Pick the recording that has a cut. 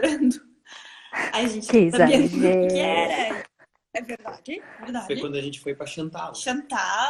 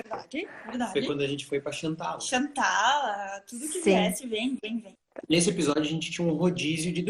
second; 1 cut; at 5.0 s

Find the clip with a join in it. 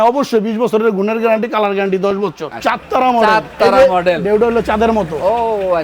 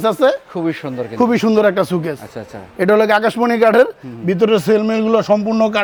first; 1 cut; at 2.5 s

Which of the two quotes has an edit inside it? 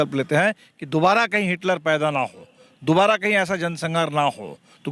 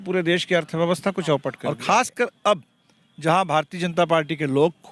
second; 1 cut; at 1.5 s

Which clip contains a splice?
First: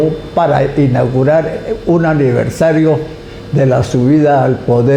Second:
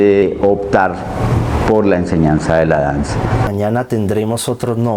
second; 1 cut; at 3.5 s

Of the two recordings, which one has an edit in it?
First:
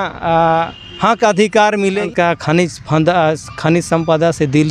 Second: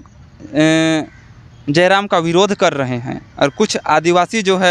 first; 1 cut; at 2.0 s

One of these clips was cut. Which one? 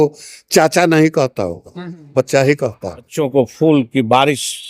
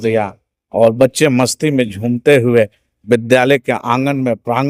first; 1 cut; at 3.2 s

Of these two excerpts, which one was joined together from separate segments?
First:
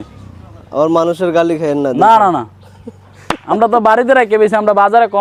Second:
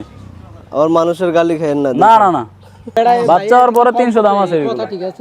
second; 1 cut; at 2.9 s

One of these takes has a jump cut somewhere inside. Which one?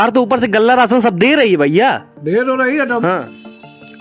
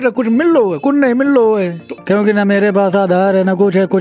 second; 1 cut; at 1.8 s

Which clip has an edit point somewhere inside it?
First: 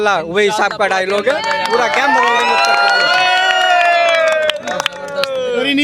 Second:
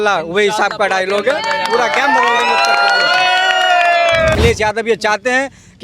second; 1 cut; at 4.4 s

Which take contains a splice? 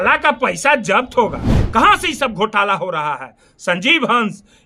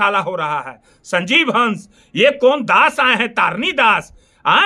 first; 1 cut; at 1.5 s

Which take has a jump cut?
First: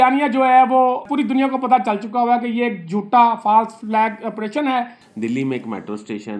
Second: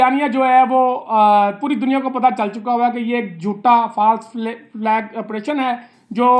first; 3 cuts; at 1.0 s, 3.8 s, 5.0 s

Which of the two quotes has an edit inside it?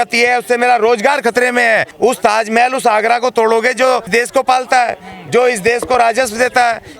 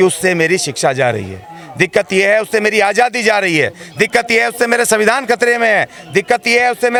first; 2 cuts; at 1.9 s, 4.1 s

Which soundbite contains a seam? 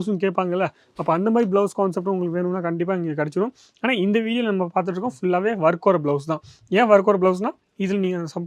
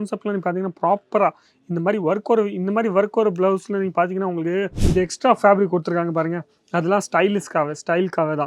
second; 1 cut; at 4.8 s

